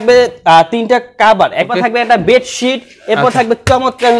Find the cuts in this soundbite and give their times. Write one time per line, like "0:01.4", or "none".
0:01.7